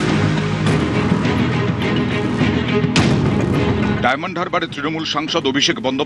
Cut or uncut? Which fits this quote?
uncut